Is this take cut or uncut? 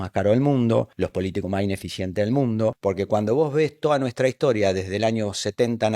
cut